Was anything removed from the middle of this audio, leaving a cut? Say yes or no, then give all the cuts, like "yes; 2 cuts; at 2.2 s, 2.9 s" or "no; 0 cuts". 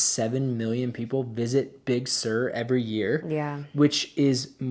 no; 0 cuts